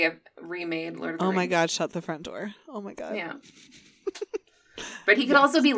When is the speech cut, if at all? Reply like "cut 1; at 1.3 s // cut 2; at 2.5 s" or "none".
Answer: none